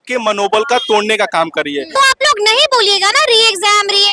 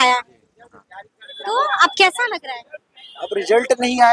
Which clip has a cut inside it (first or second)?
first